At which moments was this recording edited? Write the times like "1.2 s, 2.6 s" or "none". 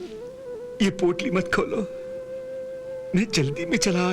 3.0 s